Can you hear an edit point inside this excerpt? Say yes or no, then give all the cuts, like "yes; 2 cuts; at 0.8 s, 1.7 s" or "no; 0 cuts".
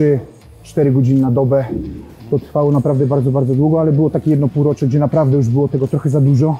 no; 0 cuts